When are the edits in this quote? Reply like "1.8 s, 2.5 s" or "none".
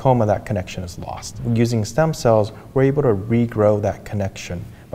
1.4 s